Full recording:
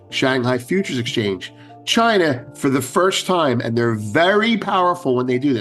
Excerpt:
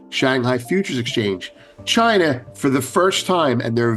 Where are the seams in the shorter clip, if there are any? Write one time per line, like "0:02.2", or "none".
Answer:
none